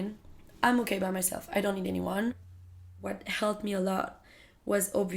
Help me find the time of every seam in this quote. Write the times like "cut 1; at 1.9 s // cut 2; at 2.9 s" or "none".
cut 1; at 2.8 s